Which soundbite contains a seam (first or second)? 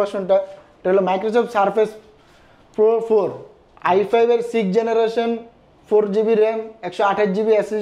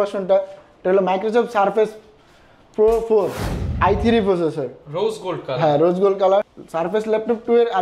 second